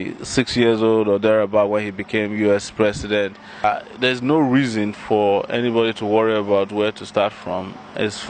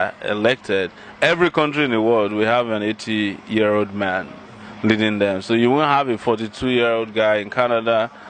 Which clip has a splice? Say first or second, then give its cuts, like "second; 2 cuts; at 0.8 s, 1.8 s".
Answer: first; 1 cut; at 3.6 s